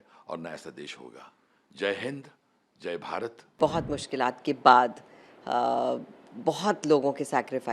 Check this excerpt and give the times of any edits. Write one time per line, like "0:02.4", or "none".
0:03.6